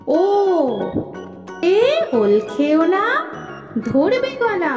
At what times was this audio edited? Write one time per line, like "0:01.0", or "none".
0:01.6